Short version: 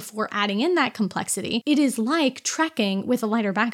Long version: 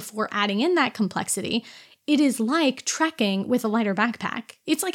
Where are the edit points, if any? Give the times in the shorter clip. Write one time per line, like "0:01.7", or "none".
0:01.6